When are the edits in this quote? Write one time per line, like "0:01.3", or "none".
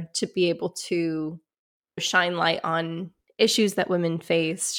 0:02.0